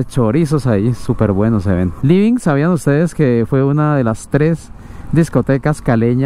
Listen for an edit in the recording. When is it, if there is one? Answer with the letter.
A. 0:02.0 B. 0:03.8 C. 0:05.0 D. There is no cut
A